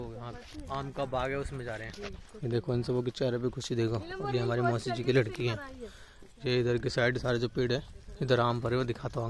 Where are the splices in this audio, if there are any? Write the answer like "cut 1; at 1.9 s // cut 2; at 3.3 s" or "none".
none